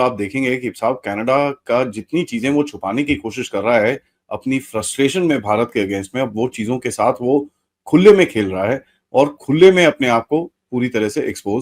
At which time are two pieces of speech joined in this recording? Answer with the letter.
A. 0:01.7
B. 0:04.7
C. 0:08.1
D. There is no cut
D